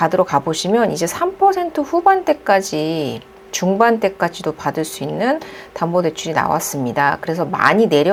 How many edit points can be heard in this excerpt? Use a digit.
0